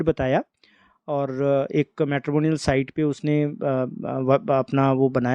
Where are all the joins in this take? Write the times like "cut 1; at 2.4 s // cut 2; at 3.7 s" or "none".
none